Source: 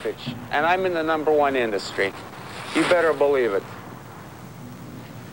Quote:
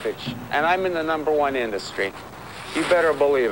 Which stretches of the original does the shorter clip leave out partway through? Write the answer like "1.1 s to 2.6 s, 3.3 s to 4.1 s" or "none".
none